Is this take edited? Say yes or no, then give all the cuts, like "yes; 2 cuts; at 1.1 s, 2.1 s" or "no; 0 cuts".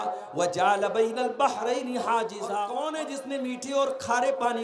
yes; 1 cut; at 2.5 s